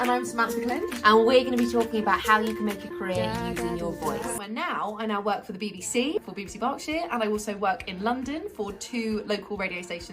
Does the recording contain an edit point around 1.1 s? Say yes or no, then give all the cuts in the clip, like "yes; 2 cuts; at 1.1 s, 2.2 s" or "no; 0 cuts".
no; 2 cuts; at 4.4 s, 6.2 s